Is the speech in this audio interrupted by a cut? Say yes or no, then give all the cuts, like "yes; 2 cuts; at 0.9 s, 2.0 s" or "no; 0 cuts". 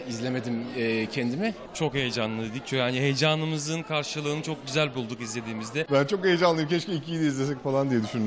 yes; 2 cuts; at 1.7 s, 5.9 s